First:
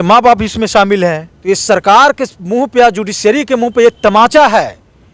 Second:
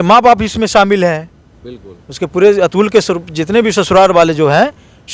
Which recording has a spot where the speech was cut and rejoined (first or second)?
first